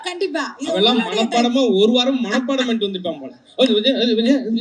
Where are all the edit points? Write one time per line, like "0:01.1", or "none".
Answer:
none